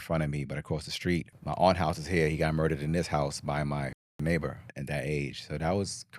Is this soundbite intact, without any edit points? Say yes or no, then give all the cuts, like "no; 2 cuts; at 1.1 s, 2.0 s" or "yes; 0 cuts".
no; 2 cuts; at 1.3 s, 4.7 s